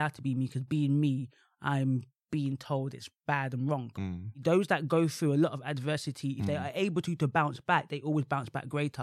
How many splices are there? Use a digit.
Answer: 1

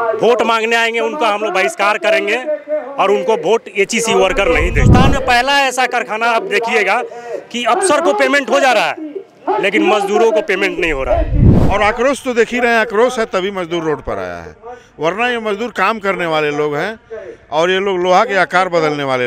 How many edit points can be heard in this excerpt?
2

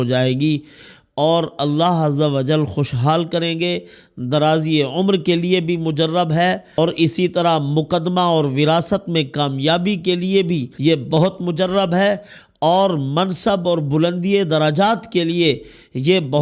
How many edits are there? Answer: 2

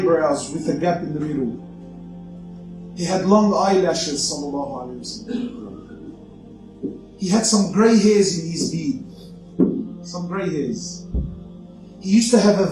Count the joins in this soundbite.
1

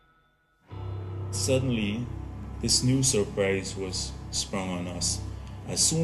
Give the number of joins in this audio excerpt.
1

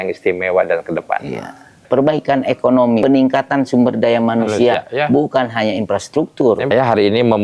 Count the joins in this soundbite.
3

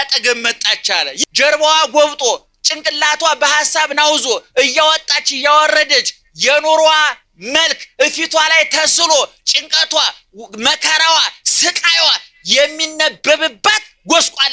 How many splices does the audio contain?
1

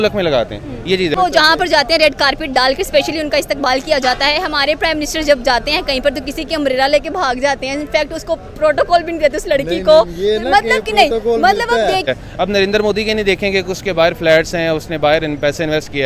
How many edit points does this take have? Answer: 2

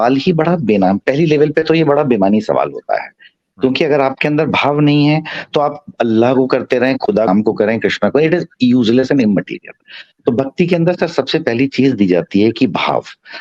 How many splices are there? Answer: 0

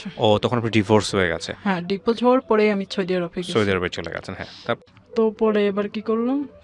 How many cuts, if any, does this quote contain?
1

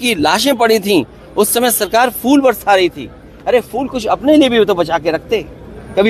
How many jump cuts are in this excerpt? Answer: 0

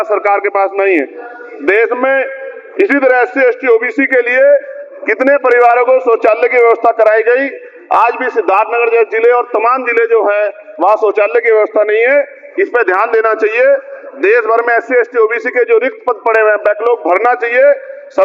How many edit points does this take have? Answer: 0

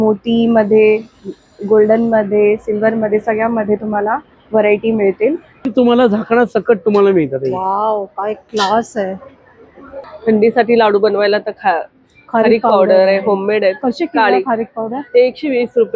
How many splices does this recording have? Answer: 2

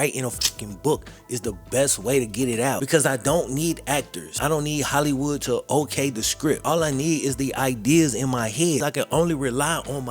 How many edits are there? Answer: 3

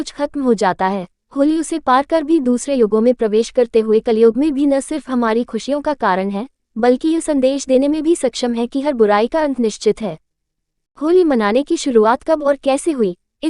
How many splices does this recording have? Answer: 1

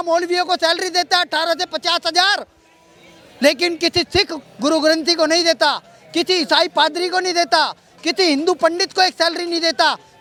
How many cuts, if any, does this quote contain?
0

